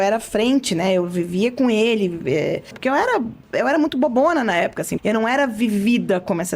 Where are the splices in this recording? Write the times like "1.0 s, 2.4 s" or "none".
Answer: 2.7 s, 4.9 s